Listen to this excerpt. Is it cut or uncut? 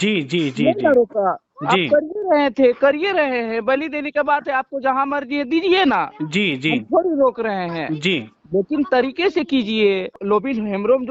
cut